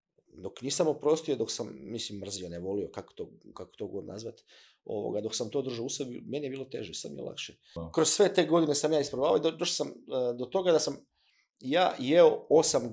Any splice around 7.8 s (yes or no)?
yes